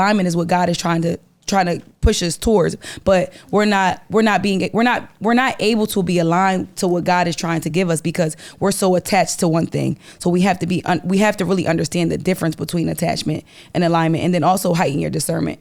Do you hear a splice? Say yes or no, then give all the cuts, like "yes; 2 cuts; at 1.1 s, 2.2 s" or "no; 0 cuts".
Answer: no; 0 cuts